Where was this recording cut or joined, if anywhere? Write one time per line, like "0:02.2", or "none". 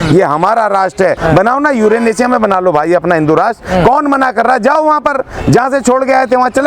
0:01.2